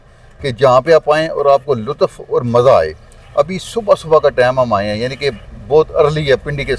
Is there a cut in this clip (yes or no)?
no